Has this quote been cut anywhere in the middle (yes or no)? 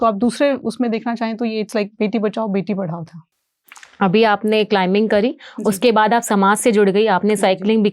no